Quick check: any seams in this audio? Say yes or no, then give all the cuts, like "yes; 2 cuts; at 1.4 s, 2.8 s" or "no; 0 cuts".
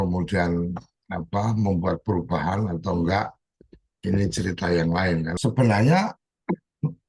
yes; 1 cut; at 5.3 s